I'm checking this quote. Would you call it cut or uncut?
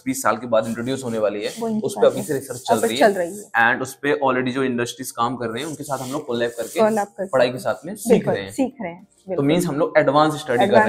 uncut